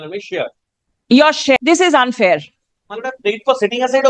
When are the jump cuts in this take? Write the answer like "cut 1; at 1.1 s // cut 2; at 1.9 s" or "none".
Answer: cut 1; at 1.6 s